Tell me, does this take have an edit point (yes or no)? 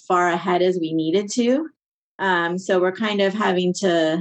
no